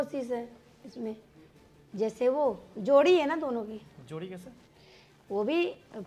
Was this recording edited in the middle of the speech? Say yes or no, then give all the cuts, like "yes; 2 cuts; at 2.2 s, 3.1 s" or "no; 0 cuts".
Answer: no; 0 cuts